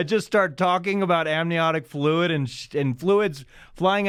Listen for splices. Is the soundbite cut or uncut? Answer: uncut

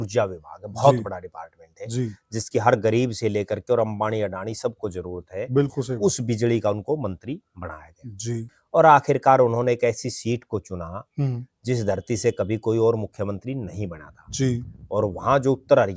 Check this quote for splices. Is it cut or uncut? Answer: cut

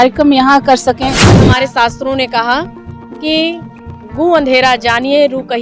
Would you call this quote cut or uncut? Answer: cut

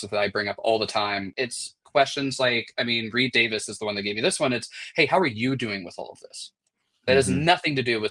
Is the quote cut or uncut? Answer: cut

